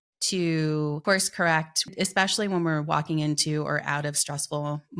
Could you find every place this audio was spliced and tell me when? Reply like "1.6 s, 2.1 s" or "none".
1.0 s, 1.9 s

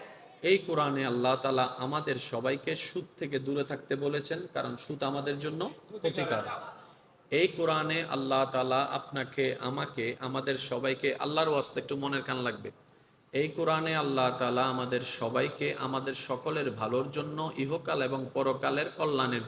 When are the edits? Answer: none

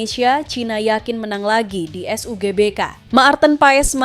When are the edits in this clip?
3.0 s

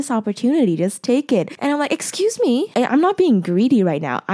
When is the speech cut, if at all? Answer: 1.5 s, 2.7 s

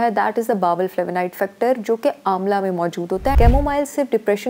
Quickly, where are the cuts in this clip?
3.3 s

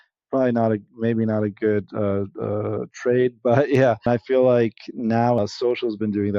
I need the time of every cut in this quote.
4.1 s, 5.4 s

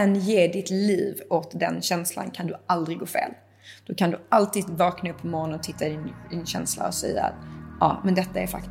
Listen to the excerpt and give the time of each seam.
none

